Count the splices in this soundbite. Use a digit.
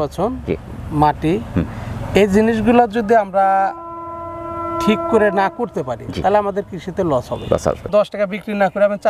1